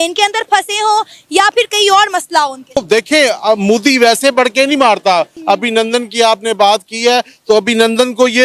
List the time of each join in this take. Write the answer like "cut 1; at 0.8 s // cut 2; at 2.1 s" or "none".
cut 1; at 2.8 s // cut 2; at 5.3 s